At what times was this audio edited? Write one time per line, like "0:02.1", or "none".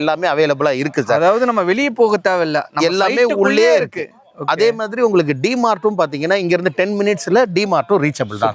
none